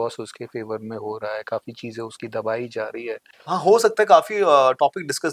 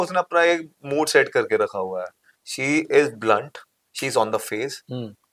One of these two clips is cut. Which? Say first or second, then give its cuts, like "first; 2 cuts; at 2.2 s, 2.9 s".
first; 1 cut; at 3.3 s